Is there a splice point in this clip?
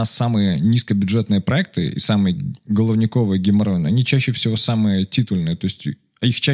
no; 0 cuts

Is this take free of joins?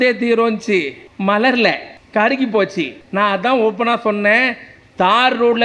no; 3 cuts; at 1.0 s, 1.9 s, 3.0 s

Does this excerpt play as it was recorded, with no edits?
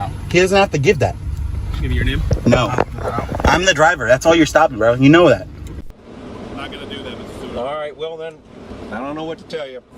no; 1 cut; at 5.8 s

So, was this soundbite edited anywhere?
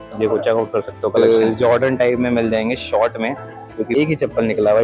yes; 2 cuts; at 1.2 s, 3.9 s

